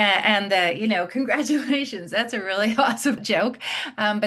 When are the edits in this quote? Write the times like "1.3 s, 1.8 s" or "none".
3.2 s

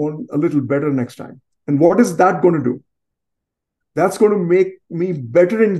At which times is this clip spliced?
none

